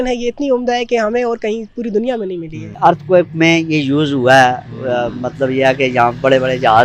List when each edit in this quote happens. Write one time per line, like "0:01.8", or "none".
0:02.8